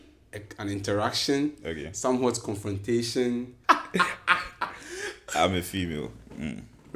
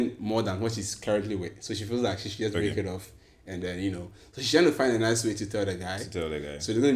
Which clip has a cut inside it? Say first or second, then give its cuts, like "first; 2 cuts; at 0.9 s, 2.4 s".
first; 1 cut; at 3.5 s